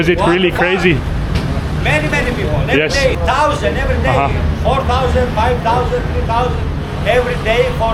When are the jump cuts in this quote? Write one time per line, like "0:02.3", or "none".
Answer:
0:03.2